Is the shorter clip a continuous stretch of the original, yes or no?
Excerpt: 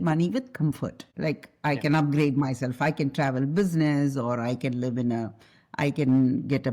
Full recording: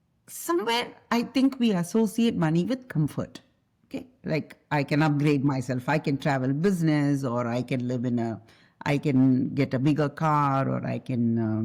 no